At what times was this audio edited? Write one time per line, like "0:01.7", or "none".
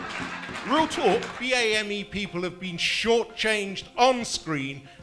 0:01.4